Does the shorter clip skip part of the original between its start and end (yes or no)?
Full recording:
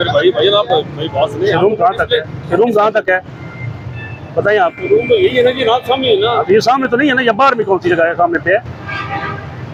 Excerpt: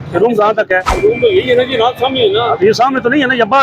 yes